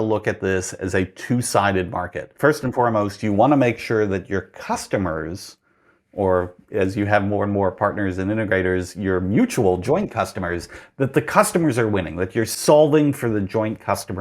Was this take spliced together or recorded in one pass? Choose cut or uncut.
cut